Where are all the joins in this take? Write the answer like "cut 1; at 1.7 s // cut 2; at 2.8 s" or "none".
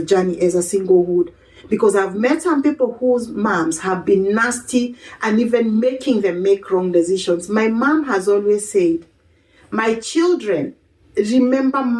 none

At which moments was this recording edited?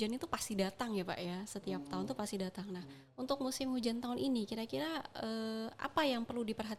none

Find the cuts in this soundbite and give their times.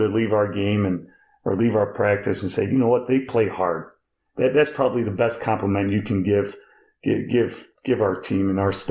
none

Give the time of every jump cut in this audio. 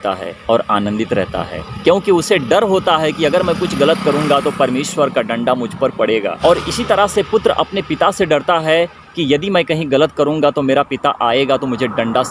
none

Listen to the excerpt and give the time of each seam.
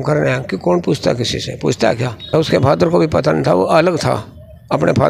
cut 1; at 2.4 s

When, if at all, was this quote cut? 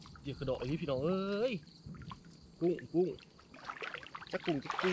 none

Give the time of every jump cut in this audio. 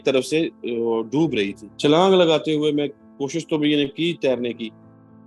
cut 1; at 1.6 s

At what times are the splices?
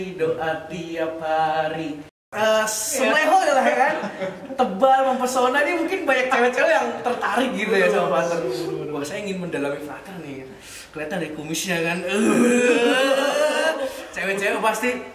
cut 1; at 2.2 s

